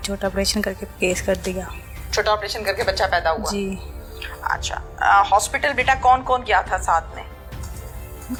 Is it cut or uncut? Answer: uncut